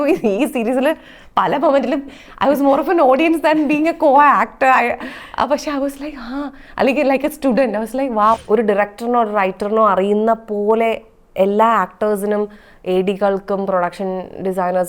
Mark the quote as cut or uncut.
cut